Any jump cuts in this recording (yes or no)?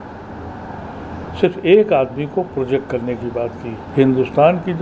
yes